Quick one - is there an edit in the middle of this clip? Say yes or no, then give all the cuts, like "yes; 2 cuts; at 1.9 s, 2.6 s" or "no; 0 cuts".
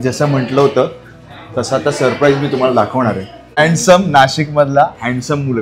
yes; 1 cut; at 3.6 s